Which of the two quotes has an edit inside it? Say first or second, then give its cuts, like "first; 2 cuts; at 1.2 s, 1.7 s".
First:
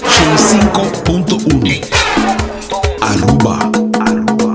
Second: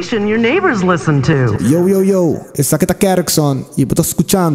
second; 1 cut; at 1.6 s